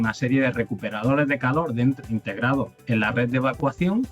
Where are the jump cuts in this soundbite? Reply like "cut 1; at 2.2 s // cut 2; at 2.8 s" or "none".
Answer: cut 1; at 2.8 s